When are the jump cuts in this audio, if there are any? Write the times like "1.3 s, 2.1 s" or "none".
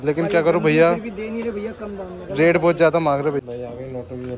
3.4 s

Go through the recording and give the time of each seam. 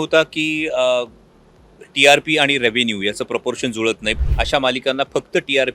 4.2 s

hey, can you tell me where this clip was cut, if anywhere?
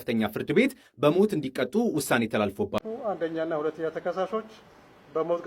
2.8 s

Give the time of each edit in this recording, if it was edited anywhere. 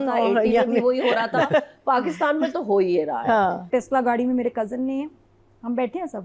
3.6 s

